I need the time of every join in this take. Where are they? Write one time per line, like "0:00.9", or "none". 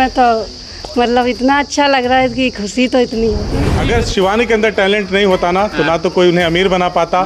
0:03.7